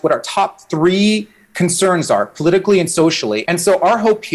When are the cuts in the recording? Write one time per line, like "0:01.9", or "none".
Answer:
0:03.4